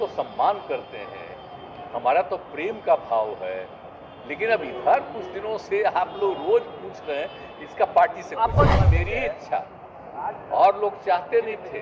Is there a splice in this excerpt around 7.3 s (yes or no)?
no